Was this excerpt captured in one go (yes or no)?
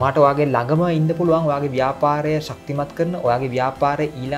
yes